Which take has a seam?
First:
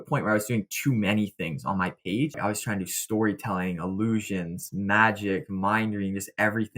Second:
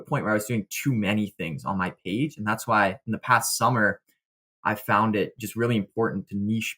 first; 1 cut; at 2.4 s

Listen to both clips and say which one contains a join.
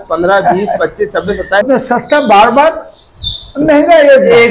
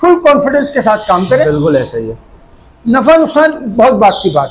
first; 1 cut; at 1.6 s

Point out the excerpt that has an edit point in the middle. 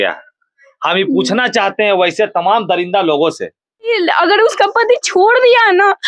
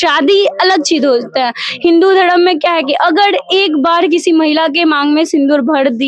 first; 1 cut; at 3.9 s

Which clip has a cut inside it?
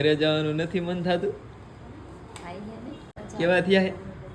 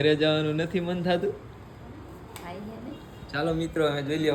first; 1 cut; at 3.2 s

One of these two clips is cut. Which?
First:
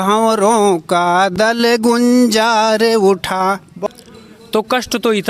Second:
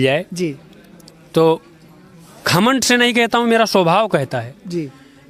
first; 1 cut; at 3.9 s

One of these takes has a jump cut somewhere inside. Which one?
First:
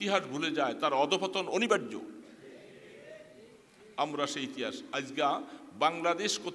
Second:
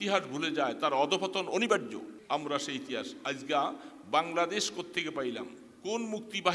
second; 1 cut; at 2.1 s

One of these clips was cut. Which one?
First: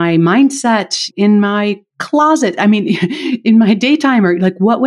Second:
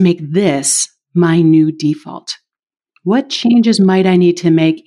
first; 1 cut; at 1.1 s

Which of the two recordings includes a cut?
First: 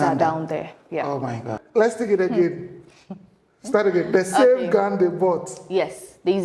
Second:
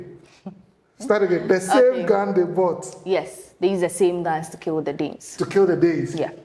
first; 1 cut; at 1.5 s

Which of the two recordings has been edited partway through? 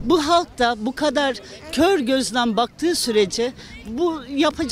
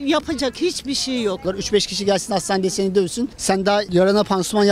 second; 1 cut; at 1.4 s

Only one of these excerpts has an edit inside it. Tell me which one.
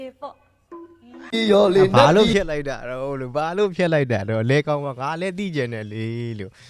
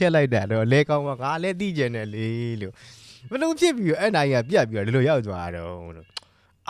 first; 1 cut; at 1.7 s

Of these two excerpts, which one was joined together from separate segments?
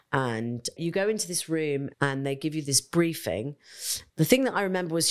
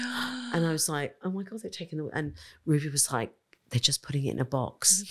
first; 3 cuts; at 0.8 s, 1.9 s, 3.9 s

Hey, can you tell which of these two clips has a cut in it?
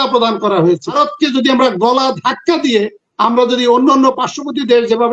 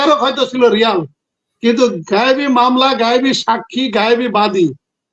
first; 1 cut; at 0.9 s

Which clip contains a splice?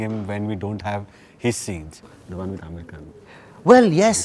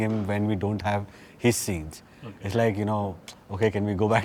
first; 1 cut; at 2.2 s

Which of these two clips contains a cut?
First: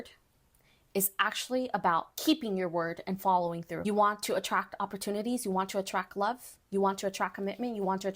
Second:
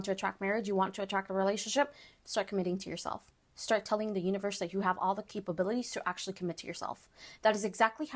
first; 1 cut; at 3.7 s

